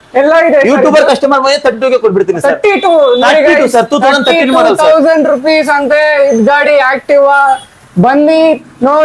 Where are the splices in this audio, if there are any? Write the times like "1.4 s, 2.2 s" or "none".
none